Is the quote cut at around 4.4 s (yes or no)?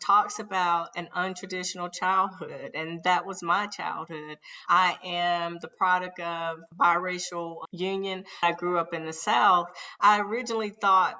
no